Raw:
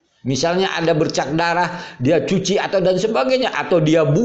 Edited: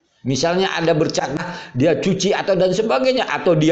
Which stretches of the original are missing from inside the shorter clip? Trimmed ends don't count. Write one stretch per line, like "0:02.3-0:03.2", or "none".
0:01.4-0:01.6